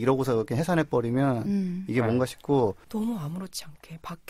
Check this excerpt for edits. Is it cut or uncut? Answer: cut